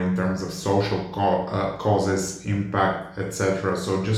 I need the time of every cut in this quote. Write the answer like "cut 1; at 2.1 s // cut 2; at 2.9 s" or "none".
none